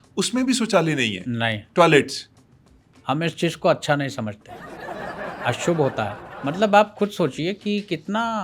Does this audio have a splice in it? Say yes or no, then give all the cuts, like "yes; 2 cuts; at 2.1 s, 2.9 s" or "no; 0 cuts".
yes; 1 cut; at 6.3 s